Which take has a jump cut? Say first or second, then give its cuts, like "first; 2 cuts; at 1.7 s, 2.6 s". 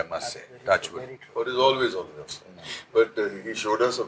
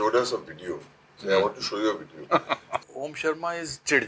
second; 1 cut; at 2.8 s